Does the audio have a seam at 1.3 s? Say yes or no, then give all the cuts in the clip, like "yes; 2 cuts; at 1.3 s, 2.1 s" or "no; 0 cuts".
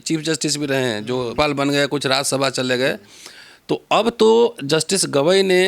yes; 1 cut; at 1.3 s